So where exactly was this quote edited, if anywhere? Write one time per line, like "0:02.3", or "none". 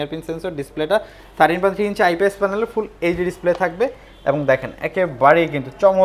none